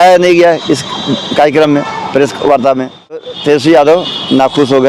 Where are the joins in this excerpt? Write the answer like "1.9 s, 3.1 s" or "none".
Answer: 3.3 s